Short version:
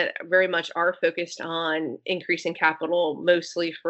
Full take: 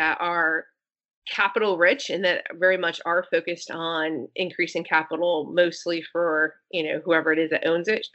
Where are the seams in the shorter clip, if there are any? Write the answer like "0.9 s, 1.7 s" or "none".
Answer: none